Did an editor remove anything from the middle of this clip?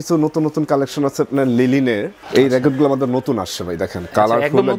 yes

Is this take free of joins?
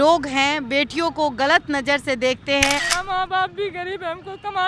no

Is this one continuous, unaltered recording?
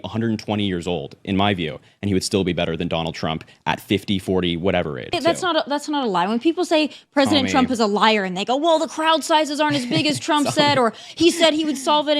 no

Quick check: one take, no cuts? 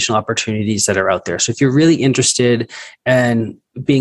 yes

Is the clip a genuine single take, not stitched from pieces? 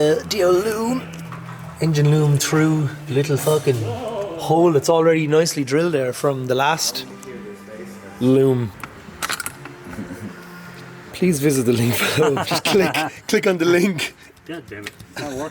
no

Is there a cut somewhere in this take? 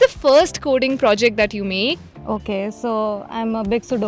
yes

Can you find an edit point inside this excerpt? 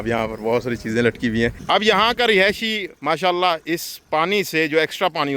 yes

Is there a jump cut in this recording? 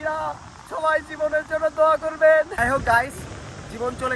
no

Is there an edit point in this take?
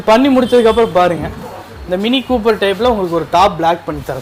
no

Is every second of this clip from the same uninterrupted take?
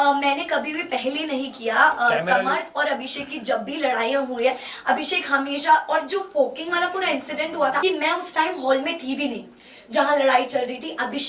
no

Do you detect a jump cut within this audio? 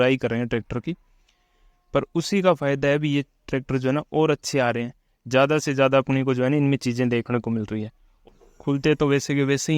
yes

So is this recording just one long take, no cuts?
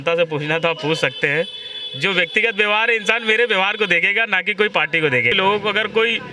no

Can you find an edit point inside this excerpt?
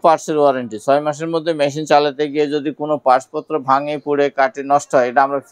no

